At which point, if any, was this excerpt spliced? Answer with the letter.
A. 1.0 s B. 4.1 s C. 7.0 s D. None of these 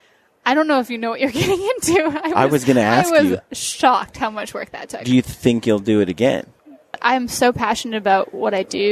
C